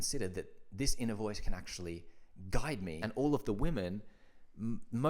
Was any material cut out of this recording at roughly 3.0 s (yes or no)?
yes